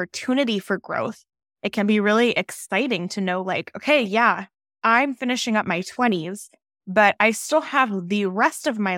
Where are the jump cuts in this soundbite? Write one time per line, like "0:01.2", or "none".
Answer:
none